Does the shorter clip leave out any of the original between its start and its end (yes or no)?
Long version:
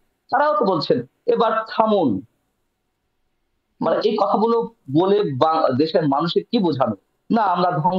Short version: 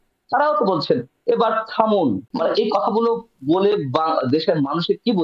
yes